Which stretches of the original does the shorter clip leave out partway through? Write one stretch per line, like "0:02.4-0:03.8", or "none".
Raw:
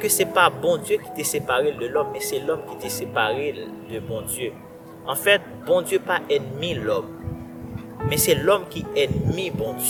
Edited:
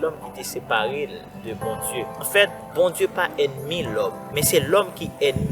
0:04.7-0:05.2
0:07.2-0:08.0

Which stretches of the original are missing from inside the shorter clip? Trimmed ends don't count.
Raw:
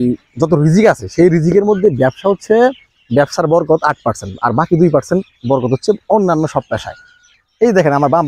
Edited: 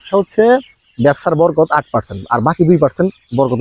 none

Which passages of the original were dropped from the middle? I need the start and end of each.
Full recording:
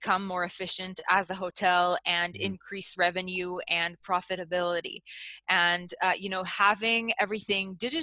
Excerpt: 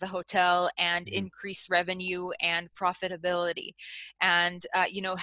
none

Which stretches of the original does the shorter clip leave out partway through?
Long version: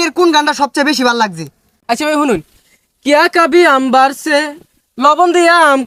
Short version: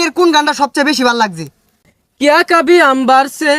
0:01.7-0:02.5

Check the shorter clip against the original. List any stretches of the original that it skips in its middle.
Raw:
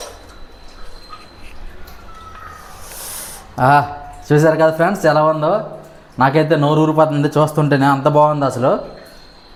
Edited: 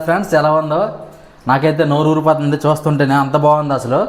none

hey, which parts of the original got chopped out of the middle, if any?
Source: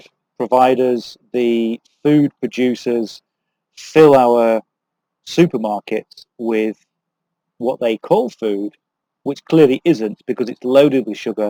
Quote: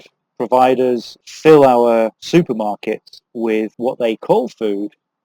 0:01.2-0:03.7
0:04.7-0:05.2
0:06.8-0:07.5

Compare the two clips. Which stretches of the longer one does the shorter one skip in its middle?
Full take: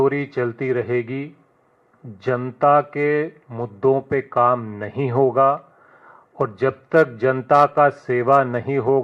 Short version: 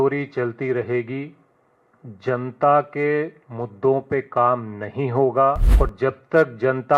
0:05.7-0:06.3

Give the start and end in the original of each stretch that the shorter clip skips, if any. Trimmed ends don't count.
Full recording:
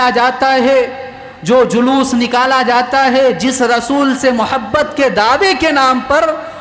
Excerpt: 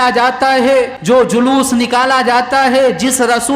0:01.0-0:01.4

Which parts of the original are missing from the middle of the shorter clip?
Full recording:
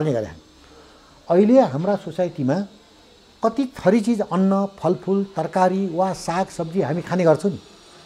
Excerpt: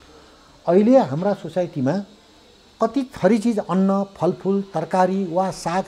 none

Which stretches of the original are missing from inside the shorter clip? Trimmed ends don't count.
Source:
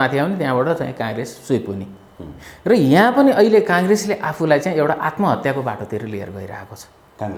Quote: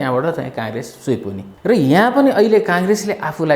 0:01.9-0:02.5

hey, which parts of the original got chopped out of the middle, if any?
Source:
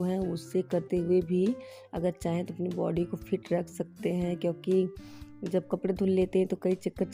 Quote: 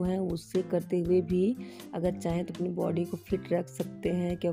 none

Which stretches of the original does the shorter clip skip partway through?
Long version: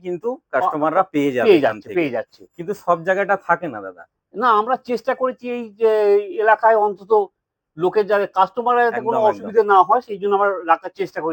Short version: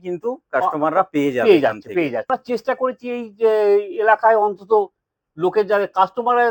0:02.3-0:04.7

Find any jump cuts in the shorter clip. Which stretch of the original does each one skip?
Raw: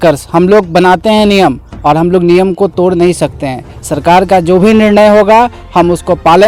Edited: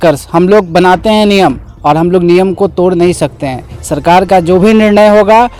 none

